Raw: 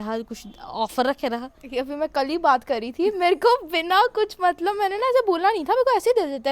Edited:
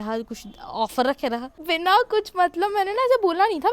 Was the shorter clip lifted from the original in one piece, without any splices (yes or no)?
no